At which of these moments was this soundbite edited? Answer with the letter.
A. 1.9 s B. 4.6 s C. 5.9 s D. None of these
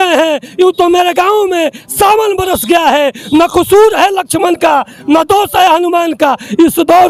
D